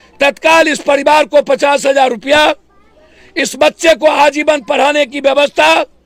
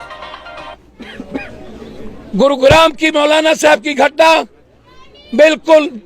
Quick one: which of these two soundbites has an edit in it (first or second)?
second